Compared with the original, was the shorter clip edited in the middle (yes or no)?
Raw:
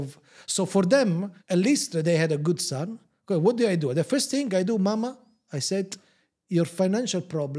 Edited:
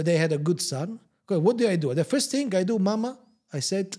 no